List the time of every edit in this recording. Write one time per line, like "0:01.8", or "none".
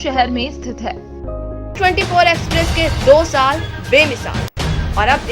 0:01.7